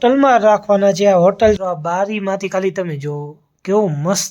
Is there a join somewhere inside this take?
yes; 1 cut; at 1.6 s

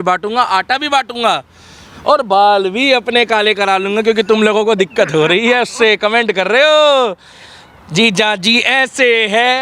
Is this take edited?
no; 0 cuts

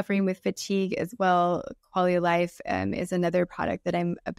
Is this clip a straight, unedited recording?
yes; 0 cuts

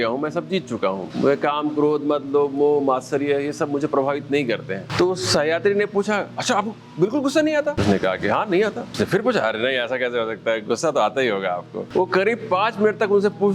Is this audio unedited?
no; 5 cuts; at 1.1 s, 4.9 s, 7.8 s, 8.8 s, 11.8 s

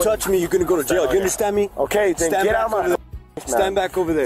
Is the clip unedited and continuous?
yes; 0 cuts

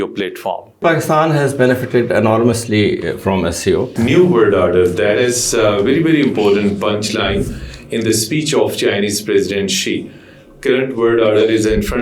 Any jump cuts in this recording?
yes; 2 cuts; at 0.8 s, 3.9 s

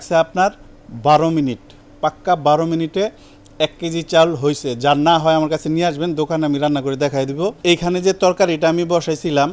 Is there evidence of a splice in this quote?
no; 0 cuts

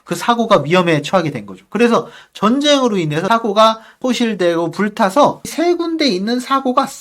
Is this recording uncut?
no; 3 cuts; at 3.2 s, 4.0 s, 5.5 s

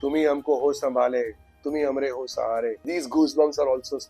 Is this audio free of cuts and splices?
no; 1 cut; at 2.8 s

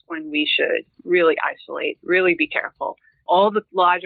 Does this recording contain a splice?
no; 0 cuts

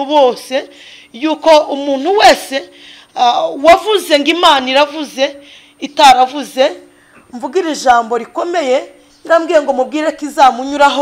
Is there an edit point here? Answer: no; 0 cuts

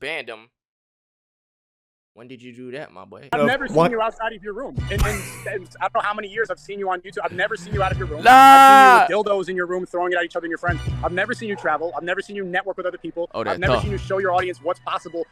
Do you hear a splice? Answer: yes; 1 cut; at 3.3 s

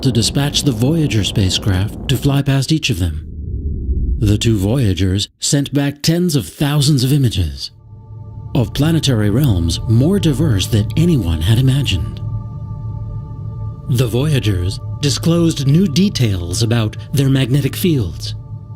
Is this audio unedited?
yes; 0 cuts

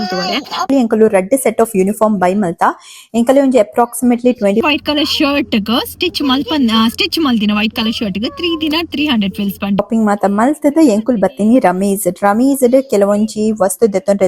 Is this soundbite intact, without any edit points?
no; 3 cuts; at 0.7 s, 4.6 s, 9.8 s

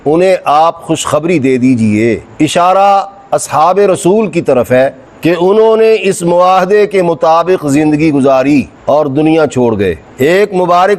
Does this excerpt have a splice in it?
yes; 2 cuts; at 2.3 s, 10.0 s

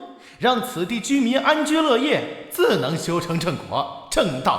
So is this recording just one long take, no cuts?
no; 1 cut; at 2.6 s

